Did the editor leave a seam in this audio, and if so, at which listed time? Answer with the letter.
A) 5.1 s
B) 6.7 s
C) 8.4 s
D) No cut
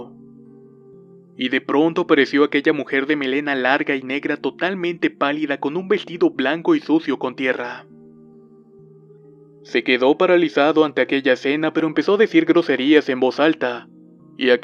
D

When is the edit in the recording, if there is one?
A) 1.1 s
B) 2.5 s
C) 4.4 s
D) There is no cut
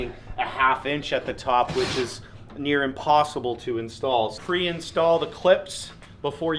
C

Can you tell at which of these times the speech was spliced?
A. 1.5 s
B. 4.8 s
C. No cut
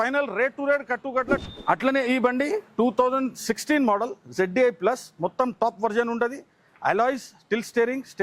A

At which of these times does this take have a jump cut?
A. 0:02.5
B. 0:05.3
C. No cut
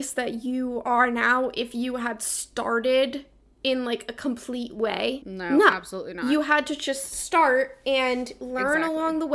B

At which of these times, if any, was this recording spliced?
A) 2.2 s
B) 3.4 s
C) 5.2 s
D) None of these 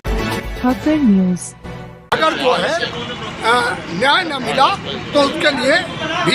A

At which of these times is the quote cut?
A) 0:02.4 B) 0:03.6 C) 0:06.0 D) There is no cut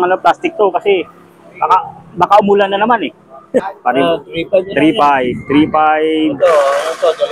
B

